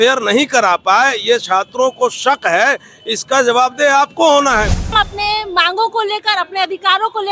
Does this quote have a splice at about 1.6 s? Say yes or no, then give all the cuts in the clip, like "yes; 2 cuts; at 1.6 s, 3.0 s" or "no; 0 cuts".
no; 1 cut; at 4.9 s